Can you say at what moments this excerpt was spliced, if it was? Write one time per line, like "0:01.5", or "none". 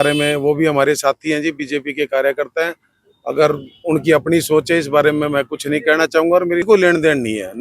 0:06.6